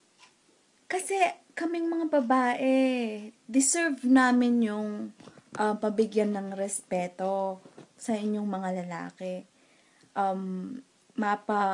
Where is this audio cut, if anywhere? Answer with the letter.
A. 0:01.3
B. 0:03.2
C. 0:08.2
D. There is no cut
A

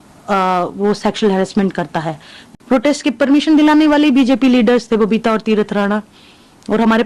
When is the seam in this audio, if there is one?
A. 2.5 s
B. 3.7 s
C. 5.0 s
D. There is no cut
A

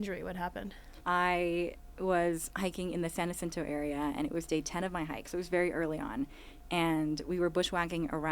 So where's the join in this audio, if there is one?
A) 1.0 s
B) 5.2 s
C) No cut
A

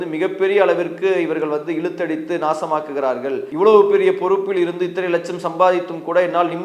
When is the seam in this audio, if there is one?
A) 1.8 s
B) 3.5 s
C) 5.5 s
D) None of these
B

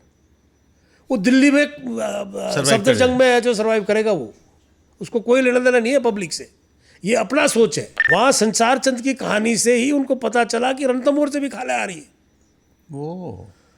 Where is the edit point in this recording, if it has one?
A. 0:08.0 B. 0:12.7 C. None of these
A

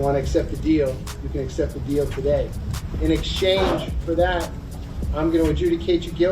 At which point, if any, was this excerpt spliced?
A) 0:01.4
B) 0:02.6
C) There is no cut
B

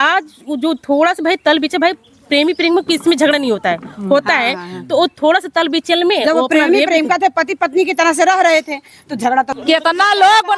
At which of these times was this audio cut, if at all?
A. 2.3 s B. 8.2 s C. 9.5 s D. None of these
C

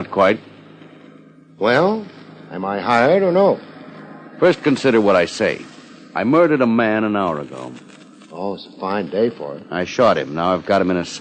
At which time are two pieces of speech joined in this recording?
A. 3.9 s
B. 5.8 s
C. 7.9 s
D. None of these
B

